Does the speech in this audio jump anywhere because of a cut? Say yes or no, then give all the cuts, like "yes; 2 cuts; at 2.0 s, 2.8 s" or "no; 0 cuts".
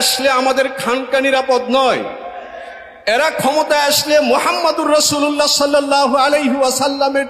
no; 0 cuts